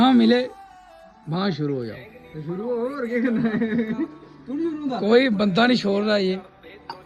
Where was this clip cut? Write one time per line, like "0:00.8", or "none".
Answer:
none